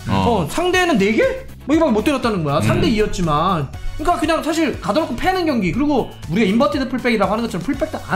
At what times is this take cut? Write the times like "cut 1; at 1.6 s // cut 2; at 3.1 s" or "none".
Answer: cut 1; at 6.2 s